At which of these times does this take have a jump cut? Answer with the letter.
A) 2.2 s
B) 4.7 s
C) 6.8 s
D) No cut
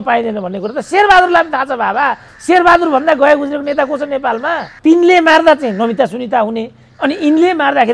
B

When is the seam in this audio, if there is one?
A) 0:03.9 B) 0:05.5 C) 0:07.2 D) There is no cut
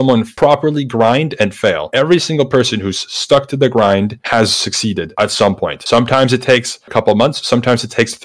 D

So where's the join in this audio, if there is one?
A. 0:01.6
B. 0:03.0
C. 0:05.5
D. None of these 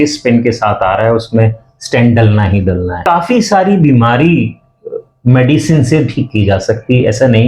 B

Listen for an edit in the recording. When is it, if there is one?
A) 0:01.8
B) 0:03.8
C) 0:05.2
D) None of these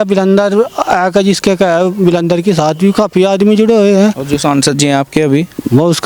D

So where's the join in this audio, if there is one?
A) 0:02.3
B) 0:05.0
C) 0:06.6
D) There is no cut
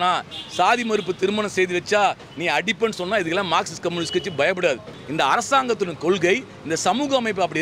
B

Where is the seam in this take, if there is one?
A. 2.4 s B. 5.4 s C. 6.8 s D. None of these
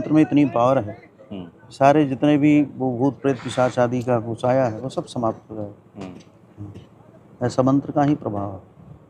D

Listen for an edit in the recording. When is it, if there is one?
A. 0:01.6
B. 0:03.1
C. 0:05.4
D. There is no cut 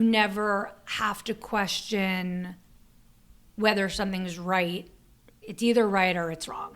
C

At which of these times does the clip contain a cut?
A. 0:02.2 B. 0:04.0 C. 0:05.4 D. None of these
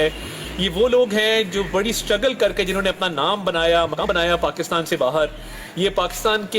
B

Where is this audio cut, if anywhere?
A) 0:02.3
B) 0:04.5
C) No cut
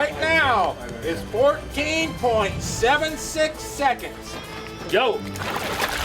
B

